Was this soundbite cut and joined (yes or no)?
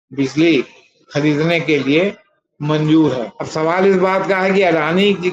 yes